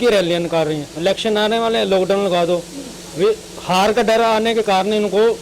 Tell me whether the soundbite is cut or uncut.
uncut